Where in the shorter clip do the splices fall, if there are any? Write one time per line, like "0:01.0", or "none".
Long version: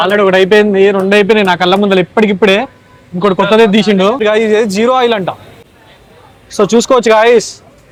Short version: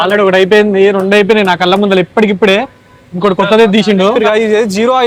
none